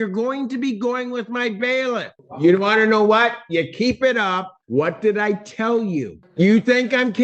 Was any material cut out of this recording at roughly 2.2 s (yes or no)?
yes